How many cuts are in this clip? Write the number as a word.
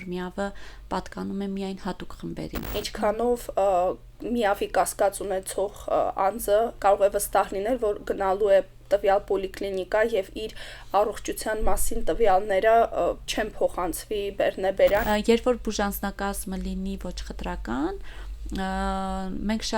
three